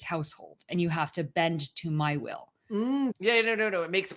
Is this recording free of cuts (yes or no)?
no